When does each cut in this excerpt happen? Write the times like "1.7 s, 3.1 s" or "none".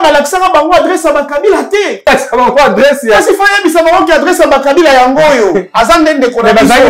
2.1 s